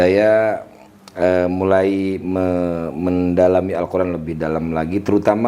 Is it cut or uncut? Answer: uncut